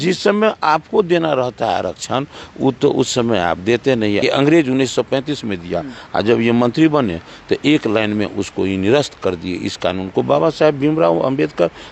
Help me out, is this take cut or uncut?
cut